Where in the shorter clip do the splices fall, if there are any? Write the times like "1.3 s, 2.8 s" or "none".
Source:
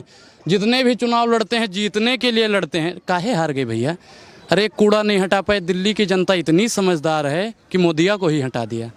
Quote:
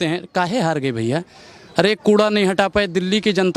none